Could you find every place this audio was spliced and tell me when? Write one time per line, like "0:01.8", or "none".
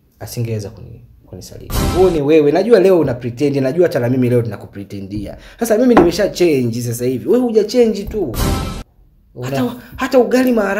0:01.9